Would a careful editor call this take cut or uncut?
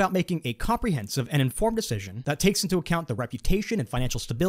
cut